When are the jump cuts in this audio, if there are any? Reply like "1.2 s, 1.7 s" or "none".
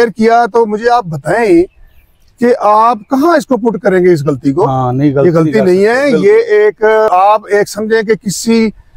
7.1 s